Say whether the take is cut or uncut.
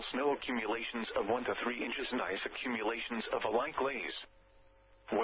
uncut